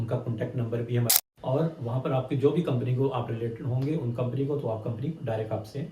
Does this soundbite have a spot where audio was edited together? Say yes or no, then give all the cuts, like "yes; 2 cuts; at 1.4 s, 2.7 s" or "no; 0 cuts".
yes; 1 cut; at 1.1 s